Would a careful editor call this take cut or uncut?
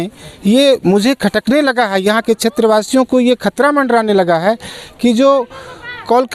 uncut